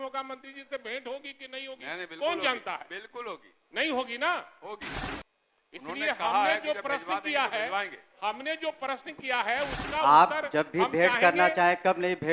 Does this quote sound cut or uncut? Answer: uncut